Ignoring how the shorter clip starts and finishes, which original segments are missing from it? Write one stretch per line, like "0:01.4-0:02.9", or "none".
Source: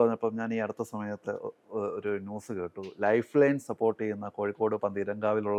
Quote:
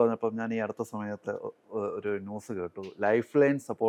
none

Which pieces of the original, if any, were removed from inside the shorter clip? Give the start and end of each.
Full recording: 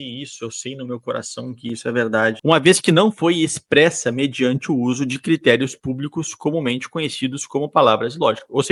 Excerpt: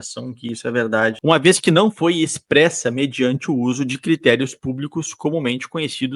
none

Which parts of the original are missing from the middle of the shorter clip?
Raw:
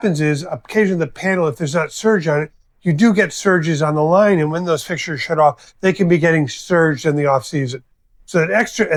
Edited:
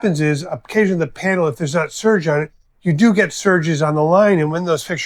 none

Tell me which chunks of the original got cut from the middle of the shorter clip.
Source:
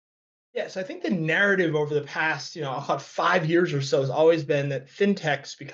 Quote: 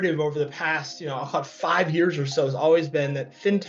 none

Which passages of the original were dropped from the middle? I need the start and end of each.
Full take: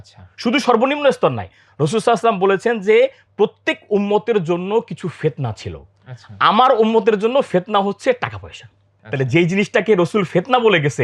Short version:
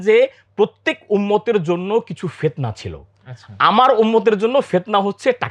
none

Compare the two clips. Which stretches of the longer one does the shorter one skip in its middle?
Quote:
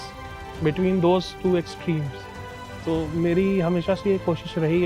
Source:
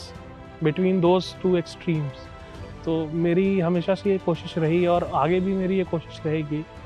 none

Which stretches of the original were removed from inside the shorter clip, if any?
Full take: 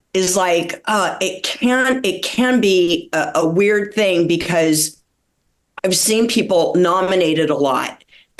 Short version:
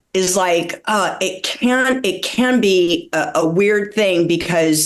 none

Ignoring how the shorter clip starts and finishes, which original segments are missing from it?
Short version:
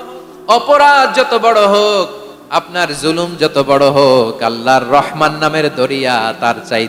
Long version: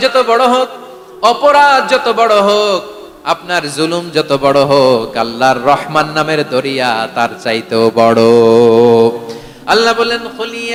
none

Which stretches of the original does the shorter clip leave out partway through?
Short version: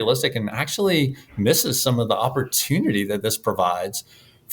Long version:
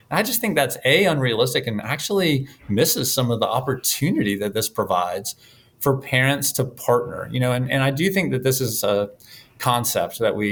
none

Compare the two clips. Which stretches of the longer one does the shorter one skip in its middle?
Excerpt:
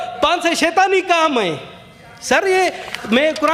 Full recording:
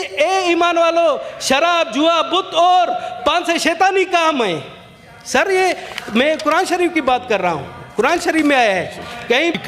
none

